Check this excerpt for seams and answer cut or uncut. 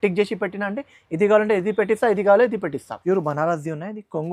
cut